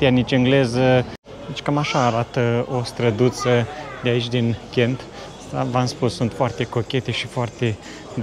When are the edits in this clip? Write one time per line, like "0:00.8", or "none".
0:01.2